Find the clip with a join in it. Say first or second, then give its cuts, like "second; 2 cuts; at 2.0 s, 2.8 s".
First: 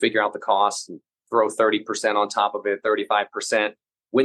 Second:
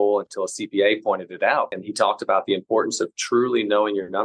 second; 1 cut; at 1.8 s